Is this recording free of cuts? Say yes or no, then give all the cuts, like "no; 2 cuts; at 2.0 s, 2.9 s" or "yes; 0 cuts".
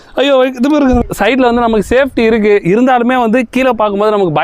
no; 1 cut; at 1.0 s